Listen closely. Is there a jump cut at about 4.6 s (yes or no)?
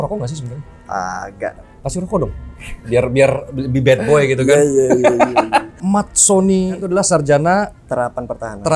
no